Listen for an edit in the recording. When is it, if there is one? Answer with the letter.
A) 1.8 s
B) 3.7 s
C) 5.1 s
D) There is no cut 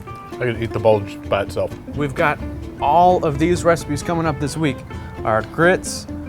A